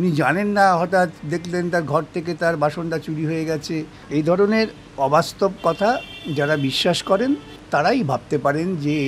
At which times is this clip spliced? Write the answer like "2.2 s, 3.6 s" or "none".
4.0 s, 7.5 s